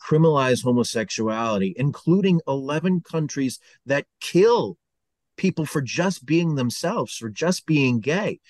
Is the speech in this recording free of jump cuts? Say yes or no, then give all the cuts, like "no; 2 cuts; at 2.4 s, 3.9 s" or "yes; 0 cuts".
yes; 0 cuts